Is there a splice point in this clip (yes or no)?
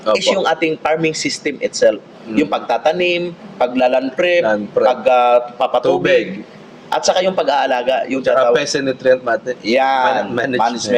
no